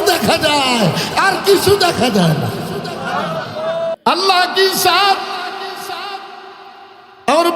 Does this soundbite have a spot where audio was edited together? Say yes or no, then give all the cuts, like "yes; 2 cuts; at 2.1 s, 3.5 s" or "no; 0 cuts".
yes; 1 cut; at 4.0 s